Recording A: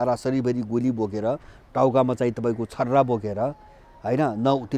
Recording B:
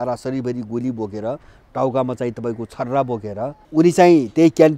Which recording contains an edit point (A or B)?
B